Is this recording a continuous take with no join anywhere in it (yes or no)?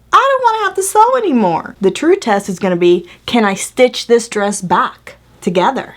no